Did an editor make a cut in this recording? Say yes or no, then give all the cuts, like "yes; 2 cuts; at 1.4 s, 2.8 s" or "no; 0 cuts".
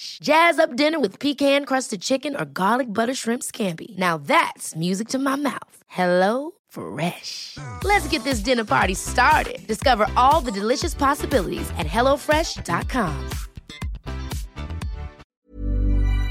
yes; 1 cut; at 15.2 s